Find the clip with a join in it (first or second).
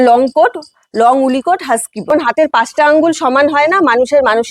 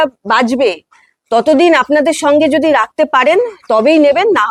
first